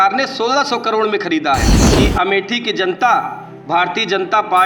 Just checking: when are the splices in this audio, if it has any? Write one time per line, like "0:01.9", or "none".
0:01.8

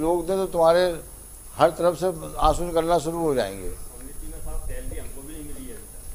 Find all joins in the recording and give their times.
none

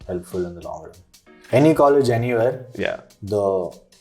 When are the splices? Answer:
0:01.3

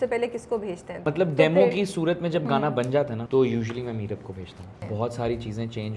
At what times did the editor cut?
0:01.1
0:03.2
0:04.8

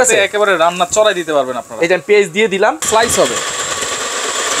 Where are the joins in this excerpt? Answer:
0:02.8

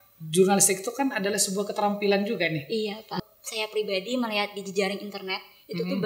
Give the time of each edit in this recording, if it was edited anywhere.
0:03.2

